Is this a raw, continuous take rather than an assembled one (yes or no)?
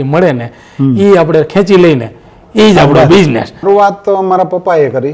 no